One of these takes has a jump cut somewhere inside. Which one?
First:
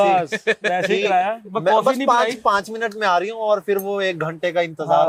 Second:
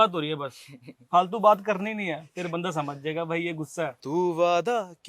second; 1 cut; at 4.0 s

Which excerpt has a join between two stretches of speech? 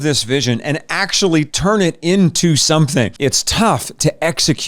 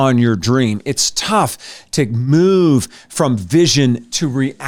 first; 1 cut; at 3.1 s

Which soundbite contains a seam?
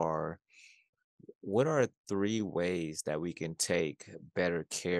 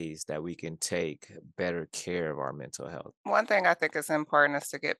second; 1 cut; at 3.2 s

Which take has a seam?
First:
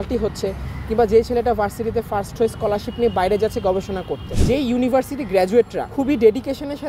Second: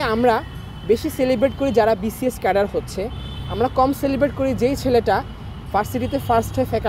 first; 2 cuts; at 4.3 s, 5.8 s

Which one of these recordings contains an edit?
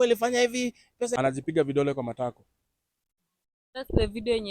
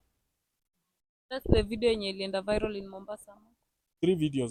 first; 1 cut; at 1.1 s

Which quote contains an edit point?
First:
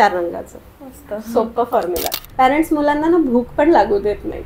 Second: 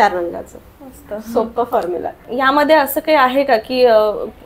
first; 1 cut; at 2.2 s

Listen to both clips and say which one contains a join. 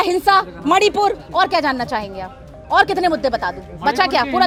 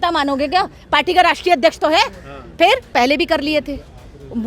second; 1 cut; at 2.9 s

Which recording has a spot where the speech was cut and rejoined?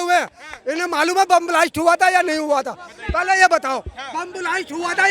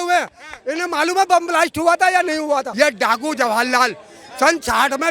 second; 1 cut; at 2.7 s

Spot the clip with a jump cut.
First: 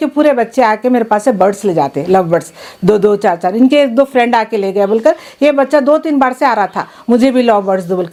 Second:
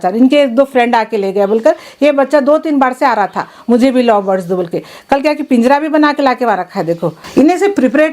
second; 1 cut; at 7.1 s

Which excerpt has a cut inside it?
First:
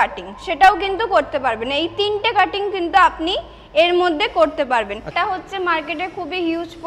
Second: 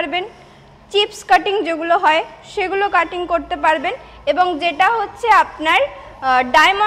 first; 1 cut; at 5.1 s

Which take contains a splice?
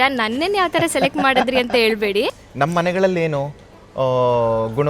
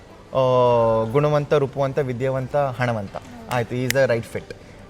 first; 1 cut; at 2.4 s

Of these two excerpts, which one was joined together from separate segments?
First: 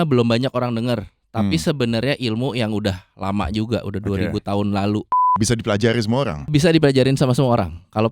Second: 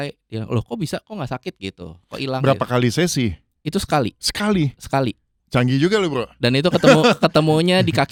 first; 2 cuts; at 5.3 s, 6.5 s

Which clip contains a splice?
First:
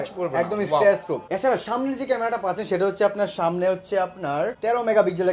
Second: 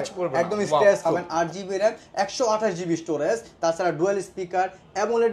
second; 1 cut; at 1.1 s

